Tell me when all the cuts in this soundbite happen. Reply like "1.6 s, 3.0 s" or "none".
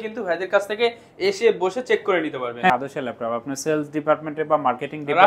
2.7 s